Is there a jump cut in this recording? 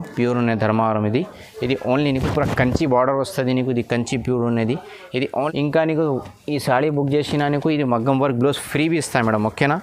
yes; 1 cut; at 5.3 s

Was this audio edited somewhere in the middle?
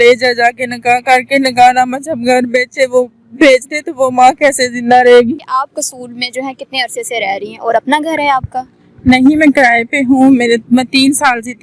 no; 0 cuts

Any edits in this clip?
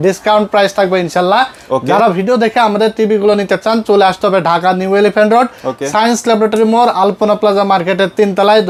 no; 0 cuts

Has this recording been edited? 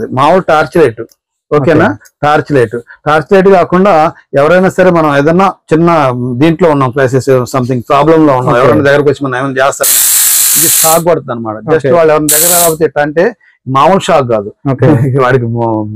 no; 0 cuts

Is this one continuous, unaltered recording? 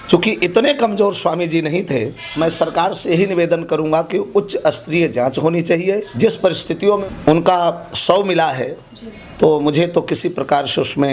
no; 2 cuts; at 2.2 s, 6.1 s

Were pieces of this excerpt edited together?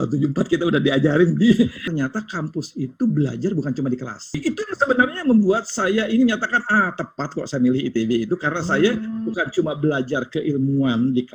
yes; 2 cuts; at 1.8 s, 4.4 s

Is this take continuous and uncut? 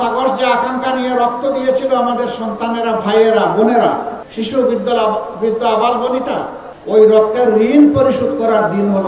no; 2 cuts; at 4.2 s, 6.7 s

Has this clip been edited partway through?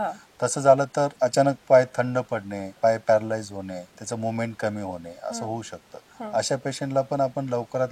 yes; 2 cuts; at 2.8 s, 3.9 s

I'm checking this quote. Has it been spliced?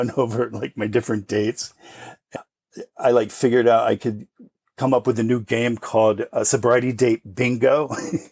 no; 0 cuts

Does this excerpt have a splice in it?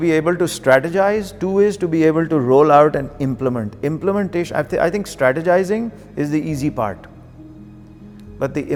no; 0 cuts

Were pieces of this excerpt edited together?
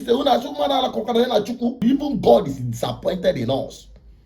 yes; 1 cut; at 1.8 s

